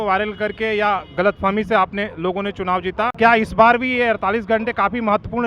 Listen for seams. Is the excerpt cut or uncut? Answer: uncut